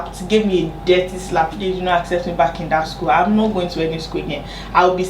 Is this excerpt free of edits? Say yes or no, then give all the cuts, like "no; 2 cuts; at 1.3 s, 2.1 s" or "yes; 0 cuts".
no; 1 cut; at 1.6 s